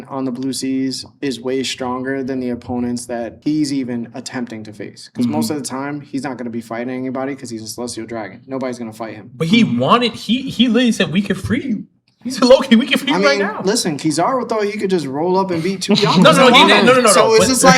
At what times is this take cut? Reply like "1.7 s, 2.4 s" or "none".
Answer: none

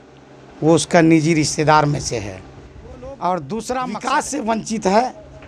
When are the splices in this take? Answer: 4.0 s

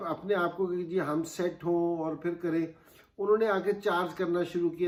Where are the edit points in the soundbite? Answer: none

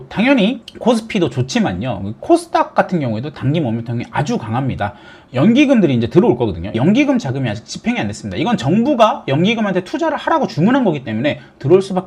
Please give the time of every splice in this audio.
none

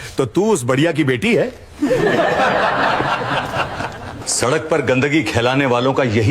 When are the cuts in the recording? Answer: 4.2 s

